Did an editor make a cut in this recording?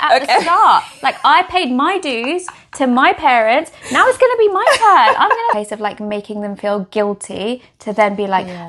yes; 1 cut; at 5.6 s

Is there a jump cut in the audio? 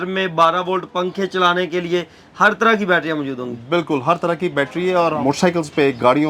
yes; 1 cut; at 5.2 s

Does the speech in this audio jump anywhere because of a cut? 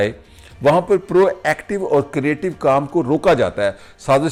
no; 0 cuts

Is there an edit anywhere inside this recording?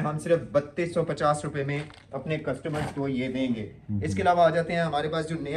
no; 0 cuts

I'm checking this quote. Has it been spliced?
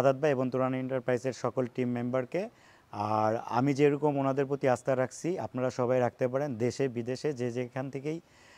no; 0 cuts

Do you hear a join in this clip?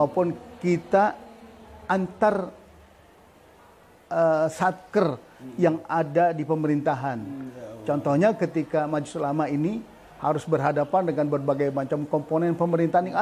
no; 0 cuts

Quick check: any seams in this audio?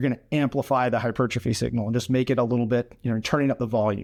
no; 0 cuts

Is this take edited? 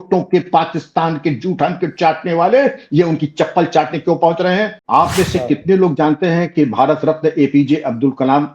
yes; 1 cut; at 4.8 s

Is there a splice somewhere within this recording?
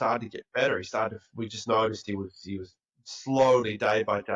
no; 0 cuts

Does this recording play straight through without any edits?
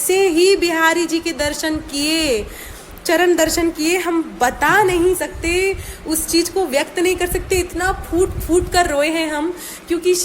yes; 0 cuts

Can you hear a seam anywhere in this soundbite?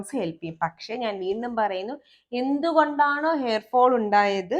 no; 0 cuts

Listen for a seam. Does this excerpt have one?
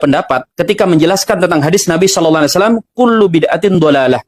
no; 0 cuts

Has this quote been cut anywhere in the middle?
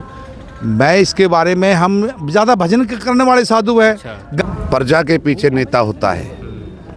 yes; 1 cut; at 4.3 s

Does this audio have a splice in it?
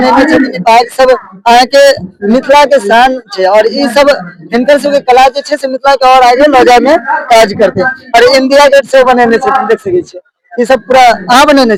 no; 0 cuts

